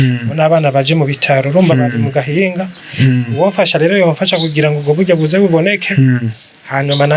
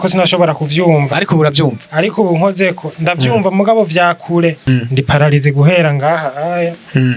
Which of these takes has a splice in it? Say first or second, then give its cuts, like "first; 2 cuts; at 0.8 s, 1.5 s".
second; 1 cut; at 4.7 s